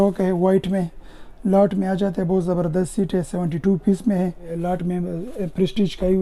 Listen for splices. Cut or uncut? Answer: cut